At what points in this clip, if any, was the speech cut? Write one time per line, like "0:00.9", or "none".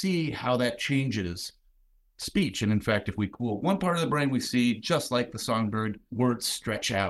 0:06.0